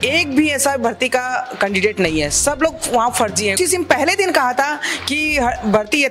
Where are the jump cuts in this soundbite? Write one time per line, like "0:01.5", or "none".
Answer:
0:03.6